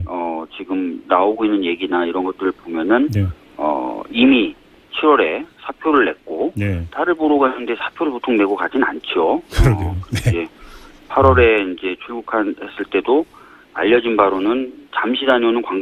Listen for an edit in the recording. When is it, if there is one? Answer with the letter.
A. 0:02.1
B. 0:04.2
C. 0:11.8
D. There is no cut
C